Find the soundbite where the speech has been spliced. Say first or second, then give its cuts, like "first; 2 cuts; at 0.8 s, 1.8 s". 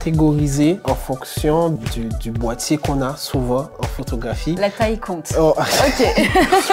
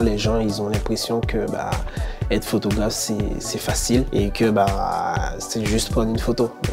first; 2 cuts; at 0.8 s, 3.8 s